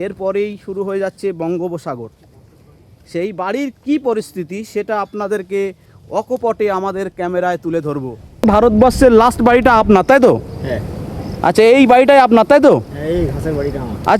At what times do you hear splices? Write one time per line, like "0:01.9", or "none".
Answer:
0:08.5